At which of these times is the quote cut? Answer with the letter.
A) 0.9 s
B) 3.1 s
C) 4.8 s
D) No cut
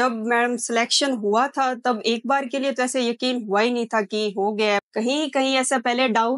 C